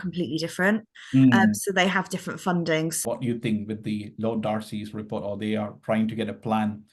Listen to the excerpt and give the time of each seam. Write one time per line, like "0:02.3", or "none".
0:02.9